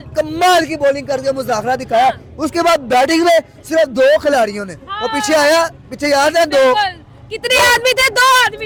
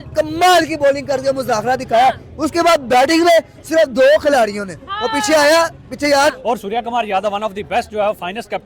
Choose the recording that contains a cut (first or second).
second